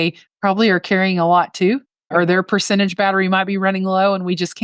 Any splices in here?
yes; 1 cut; at 2.1 s

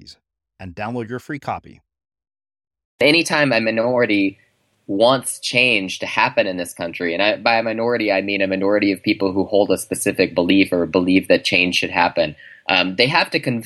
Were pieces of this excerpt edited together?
yes; 1 cut; at 3.0 s

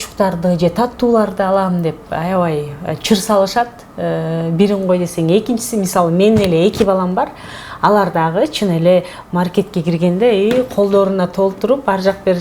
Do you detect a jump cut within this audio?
no; 0 cuts

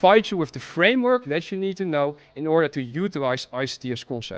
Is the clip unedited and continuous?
yes; 0 cuts

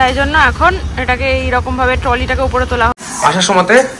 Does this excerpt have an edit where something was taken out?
yes; 1 cut; at 3.0 s

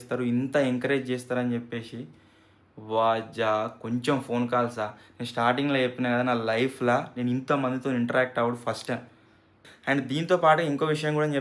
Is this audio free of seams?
no; 1 cut; at 9.6 s

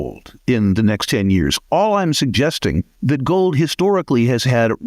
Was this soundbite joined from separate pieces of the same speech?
yes; 1 cut; at 2.9 s

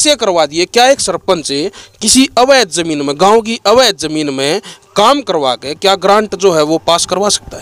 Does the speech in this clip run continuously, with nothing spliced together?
yes; 0 cuts

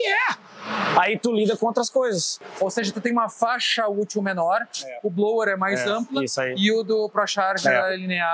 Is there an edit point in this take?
yes; 1 cut; at 2.4 s

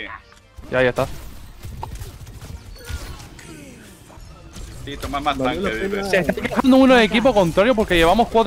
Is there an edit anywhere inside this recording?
yes; 1 cut; at 4.2 s

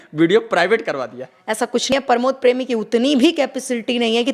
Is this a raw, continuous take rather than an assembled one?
no; 1 cut; at 1.9 s

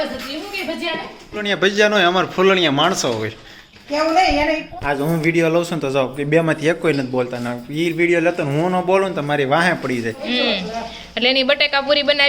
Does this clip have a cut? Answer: yes; 3 cuts; at 1.6 s, 4.6 s, 10.2 s

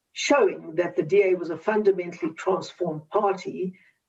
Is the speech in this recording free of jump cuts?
yes; 0 cuts

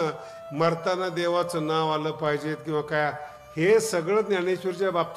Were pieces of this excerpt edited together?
no; 0 cuts

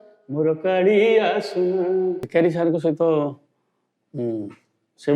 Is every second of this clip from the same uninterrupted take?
no; 1 cut; at 2.2 s

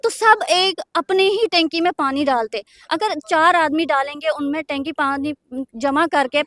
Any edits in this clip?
no; 0 cuts

